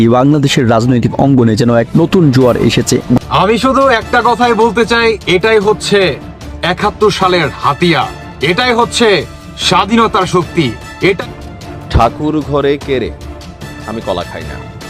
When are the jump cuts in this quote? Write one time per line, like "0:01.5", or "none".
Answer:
0:11.2

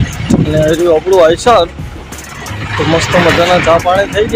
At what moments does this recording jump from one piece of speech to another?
none

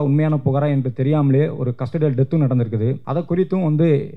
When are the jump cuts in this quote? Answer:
0:03.0

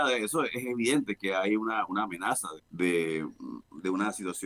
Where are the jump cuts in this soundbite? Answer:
0:02.6

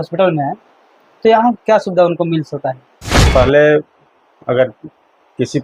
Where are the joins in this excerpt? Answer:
0:03.2

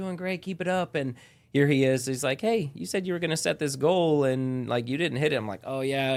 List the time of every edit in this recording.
none

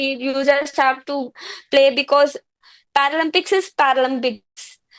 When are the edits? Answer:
none

